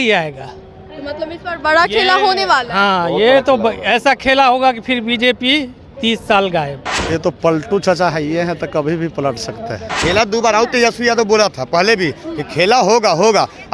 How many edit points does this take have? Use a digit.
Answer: 2